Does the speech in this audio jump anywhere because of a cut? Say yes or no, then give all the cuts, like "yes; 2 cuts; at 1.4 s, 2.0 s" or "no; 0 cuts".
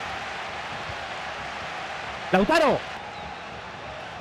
yes; 1 cut; at 3.0 s